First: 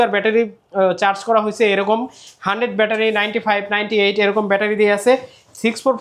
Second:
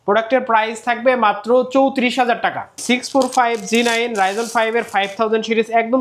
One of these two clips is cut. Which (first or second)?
second